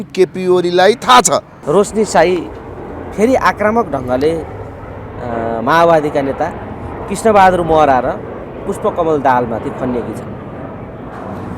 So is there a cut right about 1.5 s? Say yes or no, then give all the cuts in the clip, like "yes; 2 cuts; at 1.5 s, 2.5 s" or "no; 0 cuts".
yes; 1 cut; at 1.5 s